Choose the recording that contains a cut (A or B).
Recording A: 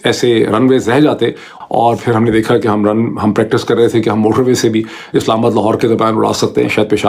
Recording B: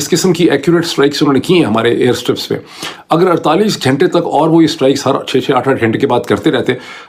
A